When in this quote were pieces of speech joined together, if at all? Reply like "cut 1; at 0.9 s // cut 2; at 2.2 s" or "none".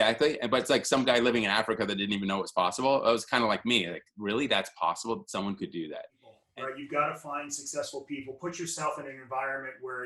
cut 1; at 6.5 s